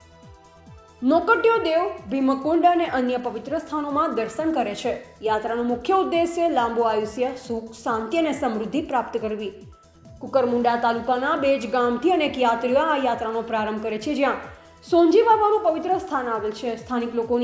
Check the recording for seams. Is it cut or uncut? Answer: cut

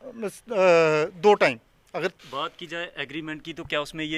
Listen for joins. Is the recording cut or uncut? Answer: cut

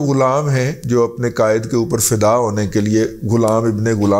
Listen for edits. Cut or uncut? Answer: uncut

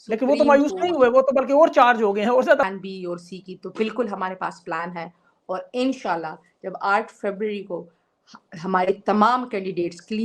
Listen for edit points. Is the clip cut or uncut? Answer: cut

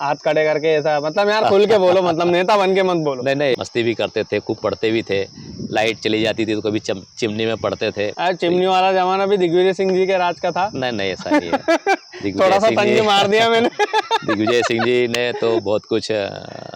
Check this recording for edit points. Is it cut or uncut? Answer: cut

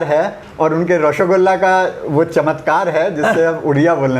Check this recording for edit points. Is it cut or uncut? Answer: uncut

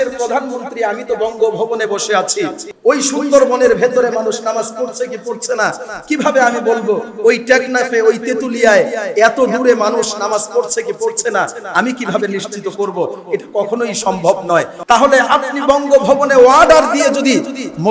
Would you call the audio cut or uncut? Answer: cut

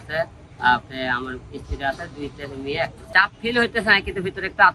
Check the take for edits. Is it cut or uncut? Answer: cut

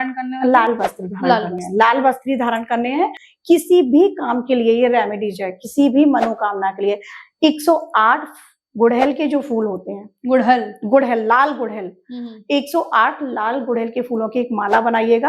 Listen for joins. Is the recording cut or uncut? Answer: cut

